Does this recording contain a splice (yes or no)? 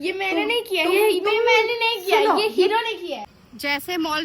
yes